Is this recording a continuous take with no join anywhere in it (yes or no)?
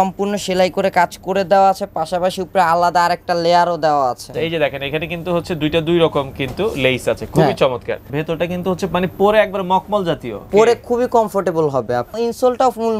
no